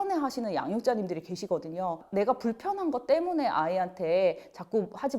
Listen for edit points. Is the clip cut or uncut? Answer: cut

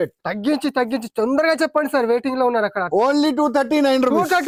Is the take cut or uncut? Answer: uncut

